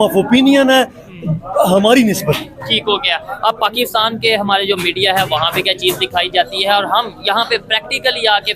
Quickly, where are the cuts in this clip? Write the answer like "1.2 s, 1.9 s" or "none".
none